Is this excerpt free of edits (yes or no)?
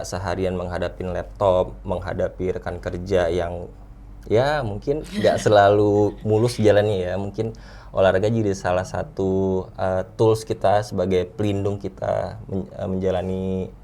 yes